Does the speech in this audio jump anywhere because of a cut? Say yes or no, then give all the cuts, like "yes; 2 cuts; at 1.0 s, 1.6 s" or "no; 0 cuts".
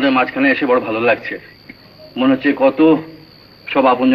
no; 0 cuts